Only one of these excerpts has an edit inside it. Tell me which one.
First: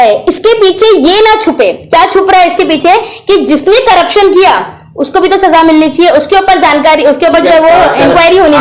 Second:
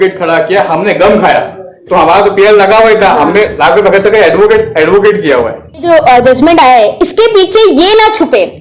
second; 2 cuts; at 1.9 s, 5.8 s

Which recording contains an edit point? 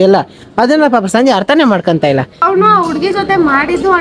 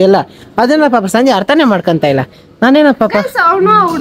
first; 1 cut; at 2.4 s

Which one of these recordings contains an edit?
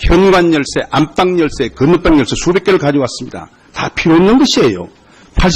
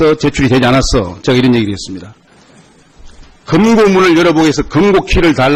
first; 1 cut; at 4.6 s

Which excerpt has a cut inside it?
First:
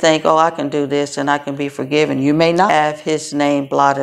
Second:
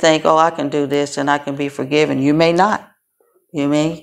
first; 1 cut; at 2.7 s

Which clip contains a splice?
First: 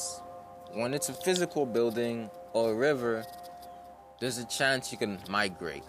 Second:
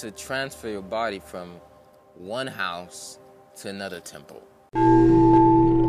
second; 1 cut; at 4.7 s

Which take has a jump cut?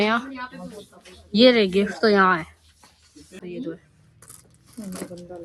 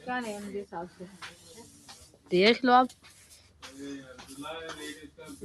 first; 1 cut; at 3.4 s

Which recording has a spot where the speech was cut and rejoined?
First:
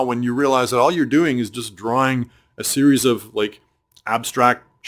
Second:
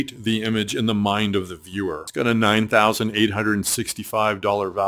second; 1 cut; at 2.0 s

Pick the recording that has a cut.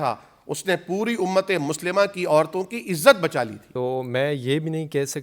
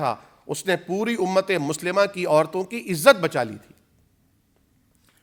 first; 1 cut; at 3.6 s

